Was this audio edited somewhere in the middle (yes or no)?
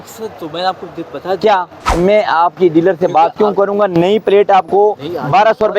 yes